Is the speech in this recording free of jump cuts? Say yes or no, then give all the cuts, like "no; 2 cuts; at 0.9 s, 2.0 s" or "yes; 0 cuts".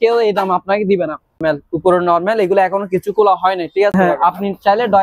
no; 2 cuts; at 1.4 s, 3.9 s